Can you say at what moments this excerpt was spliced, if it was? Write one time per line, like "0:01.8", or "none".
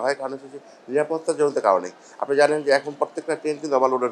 none